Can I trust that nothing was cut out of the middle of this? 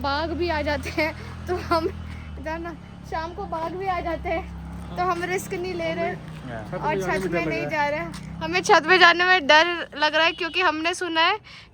yes; 0 cuts

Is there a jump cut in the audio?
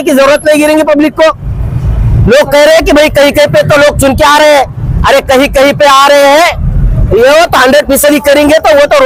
no; 0 cuts

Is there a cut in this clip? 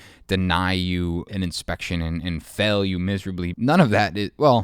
yes; 2 cuts; at 1.3 s, 3.5 s

